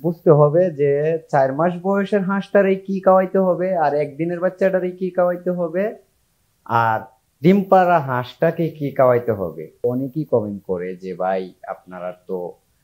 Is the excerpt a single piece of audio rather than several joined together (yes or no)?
no